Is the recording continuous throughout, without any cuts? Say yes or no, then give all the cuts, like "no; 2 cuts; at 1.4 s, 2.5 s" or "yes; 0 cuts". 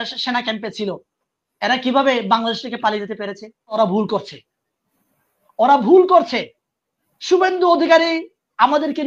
no; 1 cut; at 3.8 s